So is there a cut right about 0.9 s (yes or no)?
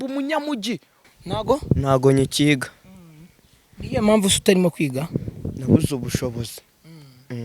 yes